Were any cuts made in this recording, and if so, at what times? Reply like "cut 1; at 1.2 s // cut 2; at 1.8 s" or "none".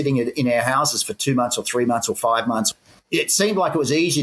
none